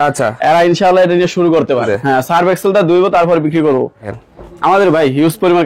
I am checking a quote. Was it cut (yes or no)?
yes